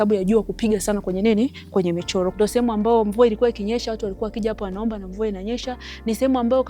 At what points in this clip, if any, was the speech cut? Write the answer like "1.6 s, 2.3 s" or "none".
2.3 s